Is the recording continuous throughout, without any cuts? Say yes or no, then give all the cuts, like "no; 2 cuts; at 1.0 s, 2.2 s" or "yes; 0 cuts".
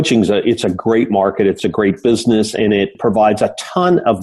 no; 2 cuts; at 1.6 s, 3.0 s